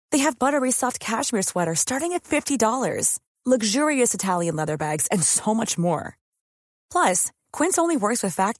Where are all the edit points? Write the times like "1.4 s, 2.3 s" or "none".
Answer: none